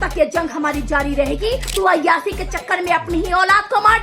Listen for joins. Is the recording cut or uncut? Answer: cut